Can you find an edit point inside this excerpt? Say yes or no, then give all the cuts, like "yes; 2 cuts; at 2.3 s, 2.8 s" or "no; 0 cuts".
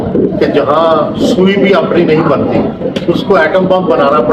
no; 0 cuts